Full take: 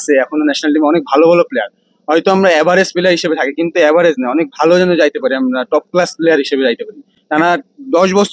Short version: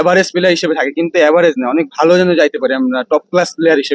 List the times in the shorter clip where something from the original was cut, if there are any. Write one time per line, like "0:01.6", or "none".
none